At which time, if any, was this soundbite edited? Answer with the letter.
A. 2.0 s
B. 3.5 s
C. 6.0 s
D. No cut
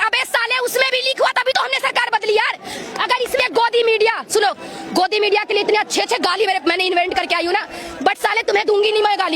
B